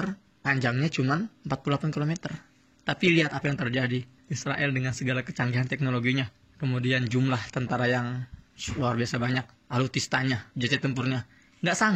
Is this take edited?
yes; 2 cuts; at 9.6 s, 10.5 s

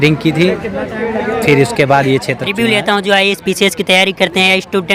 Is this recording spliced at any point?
yes; 1 cut; at 2.4 s

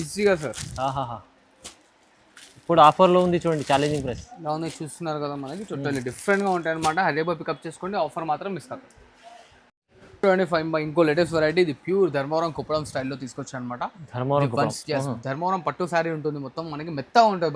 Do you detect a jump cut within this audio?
no; 0 cuts

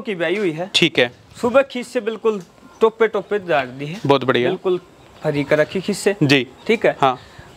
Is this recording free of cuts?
yes; 0 cuts

